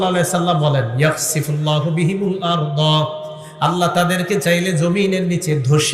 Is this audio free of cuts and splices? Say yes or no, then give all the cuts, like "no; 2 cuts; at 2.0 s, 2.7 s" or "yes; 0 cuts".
yes; 0 cuts